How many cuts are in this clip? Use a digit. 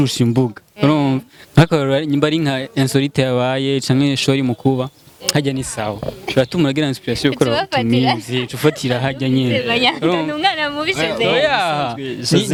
0